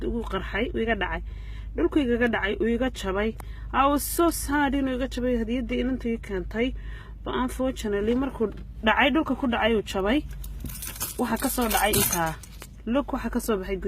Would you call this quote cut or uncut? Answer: cut